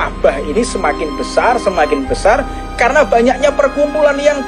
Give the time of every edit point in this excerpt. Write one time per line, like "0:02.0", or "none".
none